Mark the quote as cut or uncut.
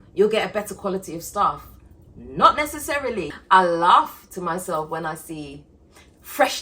cut